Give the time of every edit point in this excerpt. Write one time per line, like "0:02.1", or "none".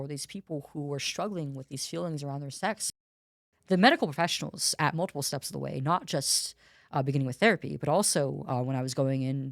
0:03.0